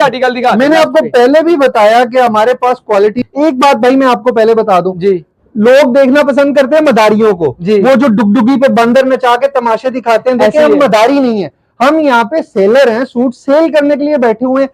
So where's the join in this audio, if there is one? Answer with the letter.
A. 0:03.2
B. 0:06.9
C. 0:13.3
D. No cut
A